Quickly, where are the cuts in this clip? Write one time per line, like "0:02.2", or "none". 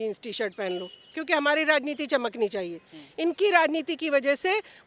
none